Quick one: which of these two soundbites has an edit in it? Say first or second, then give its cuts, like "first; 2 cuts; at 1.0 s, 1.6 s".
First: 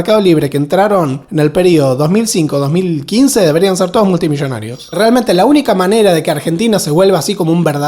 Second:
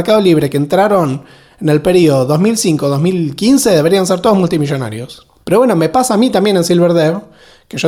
first; 2 cuts; at 1.2 s, 4.8 s